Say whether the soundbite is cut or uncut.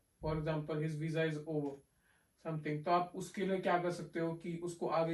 uncut